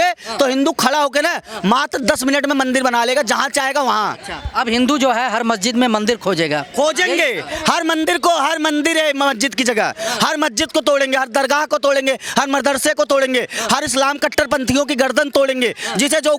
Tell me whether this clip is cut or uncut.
uncut